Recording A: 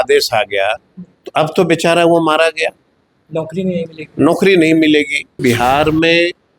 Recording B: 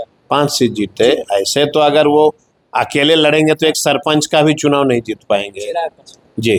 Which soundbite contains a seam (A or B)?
A